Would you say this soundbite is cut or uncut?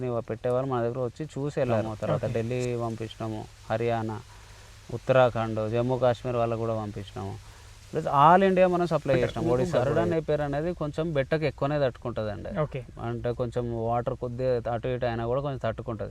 cut